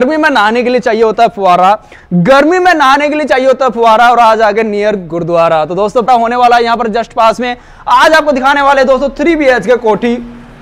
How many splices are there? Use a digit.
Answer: 1